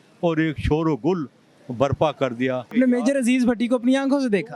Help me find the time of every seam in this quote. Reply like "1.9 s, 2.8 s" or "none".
2.7 s